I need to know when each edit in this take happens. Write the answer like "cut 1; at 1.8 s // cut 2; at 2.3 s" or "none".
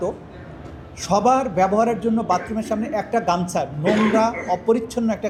none